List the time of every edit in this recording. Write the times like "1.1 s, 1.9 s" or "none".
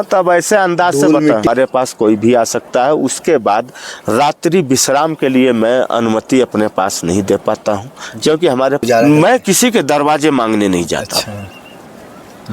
1.5 s, 8.8 s